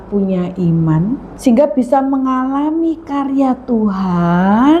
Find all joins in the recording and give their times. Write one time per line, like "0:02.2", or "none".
0:01.3

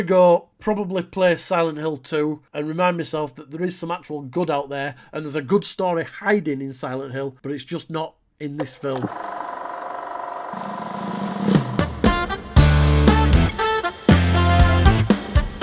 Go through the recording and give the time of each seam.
0:02.5
0:07.4
0:09.0

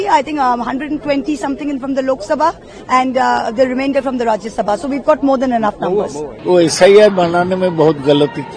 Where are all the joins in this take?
0:06.2

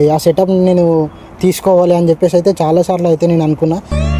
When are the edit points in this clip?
none

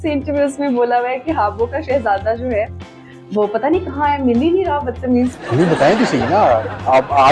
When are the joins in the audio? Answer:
none

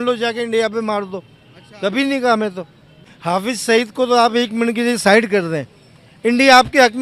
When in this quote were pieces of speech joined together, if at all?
none

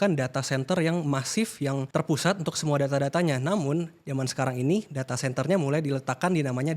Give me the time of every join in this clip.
0:01.8

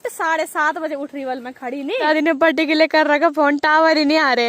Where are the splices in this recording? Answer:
0:02.1

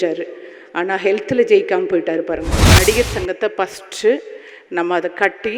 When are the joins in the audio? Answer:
0:02.7

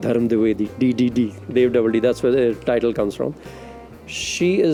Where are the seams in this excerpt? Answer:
none

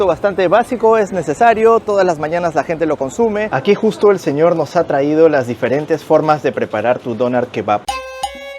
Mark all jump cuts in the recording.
0:03.5
0:07.8

